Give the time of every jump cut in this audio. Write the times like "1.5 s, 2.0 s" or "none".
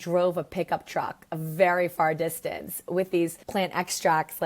3.4 s